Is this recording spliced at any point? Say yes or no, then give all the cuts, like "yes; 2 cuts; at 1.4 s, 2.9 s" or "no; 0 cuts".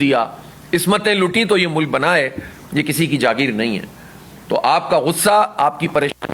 no; 0 cuts